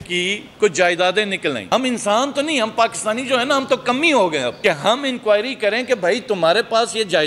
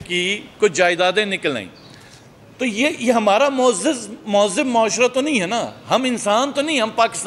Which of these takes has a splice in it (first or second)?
first